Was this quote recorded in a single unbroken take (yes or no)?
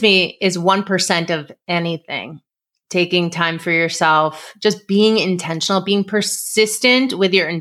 yes